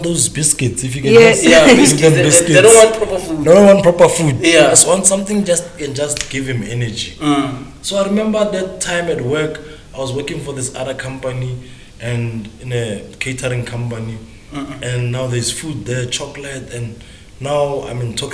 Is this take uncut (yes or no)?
yes